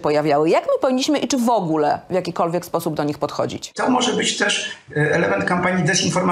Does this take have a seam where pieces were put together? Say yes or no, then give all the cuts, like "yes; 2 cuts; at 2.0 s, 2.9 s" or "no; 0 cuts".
yes; 1 cut; at 3.7 s